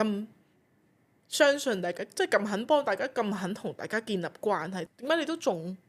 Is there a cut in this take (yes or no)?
yes